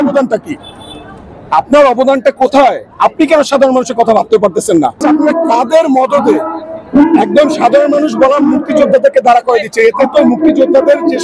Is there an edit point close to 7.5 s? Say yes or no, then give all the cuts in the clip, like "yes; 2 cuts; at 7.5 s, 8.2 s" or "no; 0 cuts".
no; 1 cut; at 5.0 s